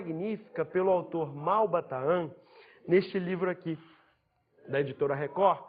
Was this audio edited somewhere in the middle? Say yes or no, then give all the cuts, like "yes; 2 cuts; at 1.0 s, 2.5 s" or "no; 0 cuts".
yes; 1 cut; at 1.7 s